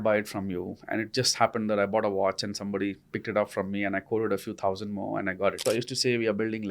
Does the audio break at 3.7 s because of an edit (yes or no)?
no